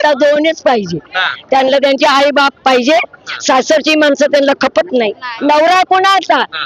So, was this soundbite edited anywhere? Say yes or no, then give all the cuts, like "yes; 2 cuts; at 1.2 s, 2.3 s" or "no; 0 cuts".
yes; 1 cut; at 5.3 s